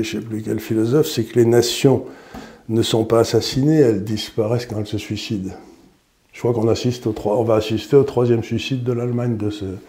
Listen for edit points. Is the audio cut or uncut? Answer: uncut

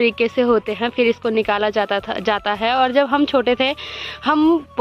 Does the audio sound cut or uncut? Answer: uncut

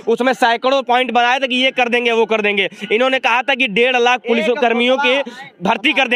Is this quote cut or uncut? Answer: uncut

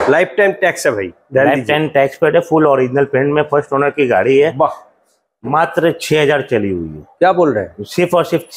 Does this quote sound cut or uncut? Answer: uncut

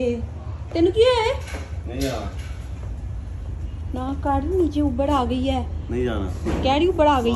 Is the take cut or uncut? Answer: uncut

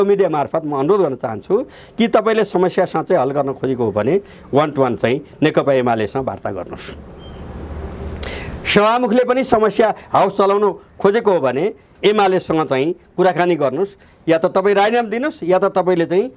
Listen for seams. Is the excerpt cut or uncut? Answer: uncut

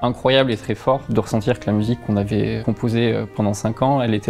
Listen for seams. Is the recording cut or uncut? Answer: cut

